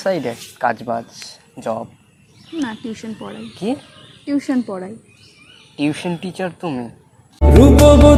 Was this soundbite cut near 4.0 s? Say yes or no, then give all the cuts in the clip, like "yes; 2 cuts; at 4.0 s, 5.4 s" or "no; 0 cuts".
no; 0 cuts